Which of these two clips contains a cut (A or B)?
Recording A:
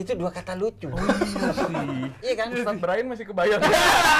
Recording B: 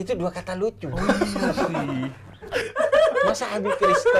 A